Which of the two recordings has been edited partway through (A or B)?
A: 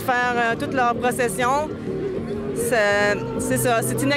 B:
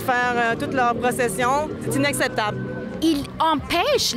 B